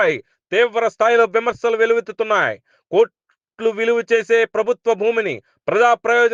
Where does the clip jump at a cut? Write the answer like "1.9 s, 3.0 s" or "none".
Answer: none